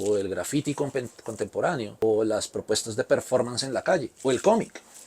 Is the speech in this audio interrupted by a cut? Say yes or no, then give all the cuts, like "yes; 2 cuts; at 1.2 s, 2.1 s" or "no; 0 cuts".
yes; 1 cut; at 2.0 s